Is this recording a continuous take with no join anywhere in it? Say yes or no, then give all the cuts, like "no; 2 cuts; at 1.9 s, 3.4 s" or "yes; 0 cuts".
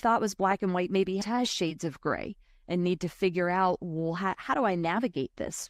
no; 1 cut; at 1.2 s